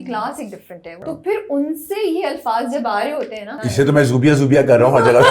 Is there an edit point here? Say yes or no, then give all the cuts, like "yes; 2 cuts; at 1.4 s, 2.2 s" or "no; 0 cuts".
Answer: yes; 2 cuts; at 1.0 s, 3.5 s